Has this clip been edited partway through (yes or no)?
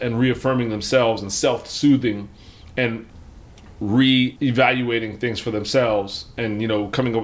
no